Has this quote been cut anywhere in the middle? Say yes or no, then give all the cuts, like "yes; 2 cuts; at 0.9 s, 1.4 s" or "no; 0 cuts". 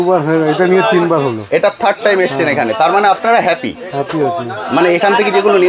no; 0 cuts